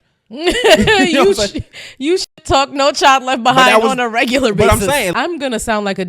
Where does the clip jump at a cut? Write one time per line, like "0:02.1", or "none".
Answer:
0:05.1